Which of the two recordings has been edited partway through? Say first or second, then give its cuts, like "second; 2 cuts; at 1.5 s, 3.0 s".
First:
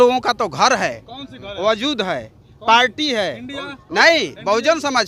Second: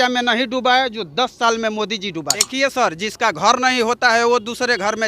second; 1 cut; at 2.5 s